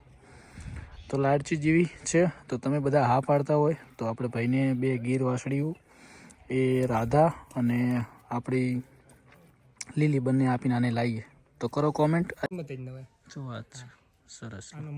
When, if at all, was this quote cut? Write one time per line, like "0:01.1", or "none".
0:12.5